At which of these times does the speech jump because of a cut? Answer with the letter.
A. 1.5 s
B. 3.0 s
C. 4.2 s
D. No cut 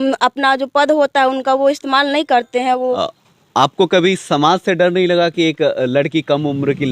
B